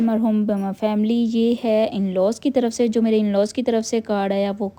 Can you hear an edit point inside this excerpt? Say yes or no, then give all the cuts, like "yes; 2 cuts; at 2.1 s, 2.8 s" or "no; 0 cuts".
no; 0 cuts